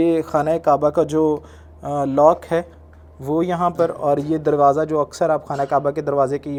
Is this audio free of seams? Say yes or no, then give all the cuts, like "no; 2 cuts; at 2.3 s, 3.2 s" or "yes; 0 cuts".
yes; 0 cuts